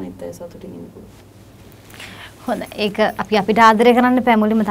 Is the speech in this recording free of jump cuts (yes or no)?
yes